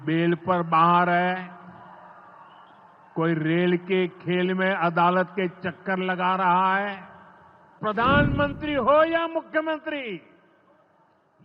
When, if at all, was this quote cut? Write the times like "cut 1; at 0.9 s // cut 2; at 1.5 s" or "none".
cut 1; at 7.8 s